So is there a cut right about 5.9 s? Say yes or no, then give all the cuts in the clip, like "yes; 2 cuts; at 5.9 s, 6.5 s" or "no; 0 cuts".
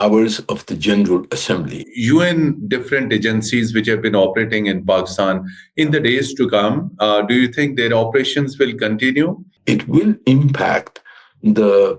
no; 2 cuts; at 1.8 s, 9.5 s